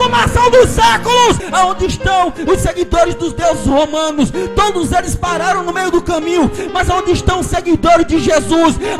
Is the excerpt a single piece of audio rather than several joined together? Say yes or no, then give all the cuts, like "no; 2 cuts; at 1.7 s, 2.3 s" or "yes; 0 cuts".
no; 1 cut; at 1.4 s